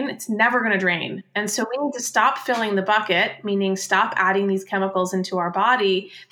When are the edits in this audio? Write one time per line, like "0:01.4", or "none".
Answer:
0:01.2